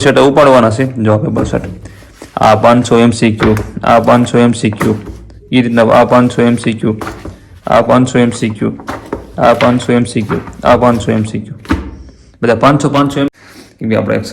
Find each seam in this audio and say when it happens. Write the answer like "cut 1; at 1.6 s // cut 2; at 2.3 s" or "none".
cut 1; at 13.4 s